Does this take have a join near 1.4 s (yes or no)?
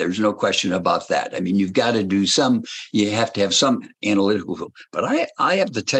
no